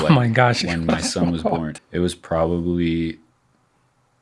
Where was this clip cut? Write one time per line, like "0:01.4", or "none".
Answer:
0:01.7